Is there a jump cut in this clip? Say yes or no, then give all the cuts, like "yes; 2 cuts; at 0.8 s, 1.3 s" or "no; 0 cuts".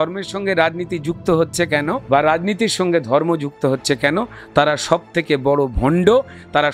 yes; 1 cut; at 2.0 s